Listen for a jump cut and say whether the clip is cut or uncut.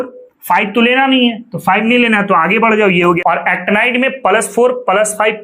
cut